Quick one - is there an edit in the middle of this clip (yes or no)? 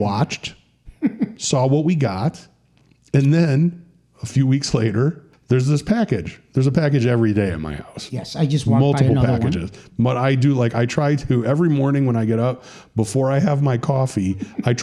yes